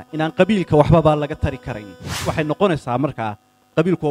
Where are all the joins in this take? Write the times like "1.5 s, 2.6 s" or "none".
2.2 s